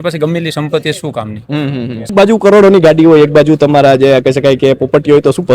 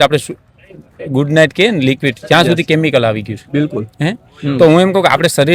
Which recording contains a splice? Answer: first; 1 cut; at 2.1 s

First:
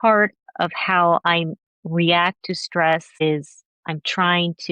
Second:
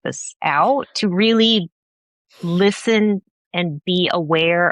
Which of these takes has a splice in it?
first; 2 cuts; at 1.2 s, 3.2 s

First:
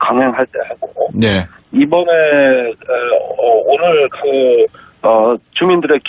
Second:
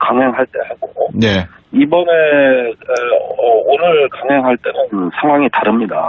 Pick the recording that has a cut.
second; 1 cut; at 4.2 s

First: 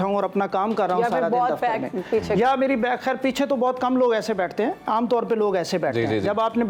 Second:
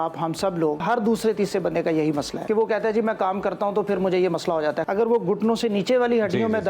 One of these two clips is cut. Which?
second; 3 cuts; at 0.8 s, 2.4 s, 4.8 s

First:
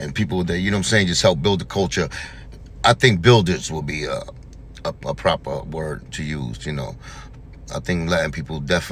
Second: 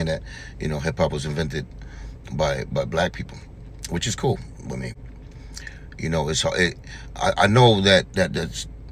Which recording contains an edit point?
second; 1 cut; at 4.9 s

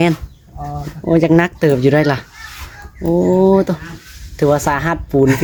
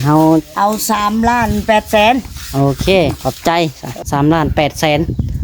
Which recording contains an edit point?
second; 1 cut; at 3.9 s

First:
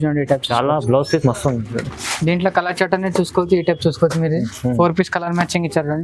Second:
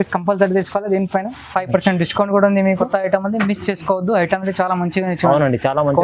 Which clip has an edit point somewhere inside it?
second; 1 cut; at 2.8 s

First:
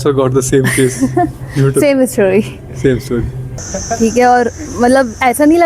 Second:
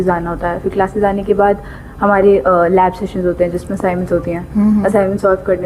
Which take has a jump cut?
first; 1 cut; at 3.4 s

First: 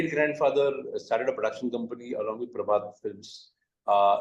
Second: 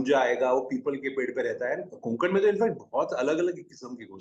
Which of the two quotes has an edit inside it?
second; 1 cut; at 2.0 s

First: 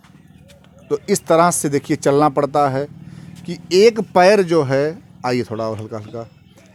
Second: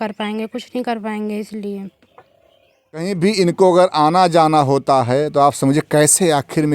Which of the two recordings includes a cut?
second; 1 cut; at 3.1 s

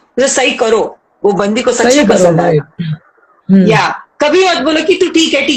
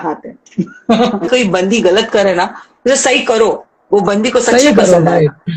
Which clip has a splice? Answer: second; 1 cut; at 1.3 s

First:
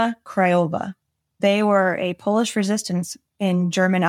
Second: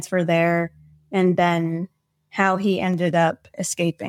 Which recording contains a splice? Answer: first; 1 cut; at 1.4 s

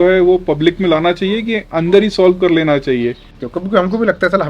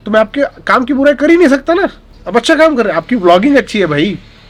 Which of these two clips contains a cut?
first; 1 cut; at 3.4 s

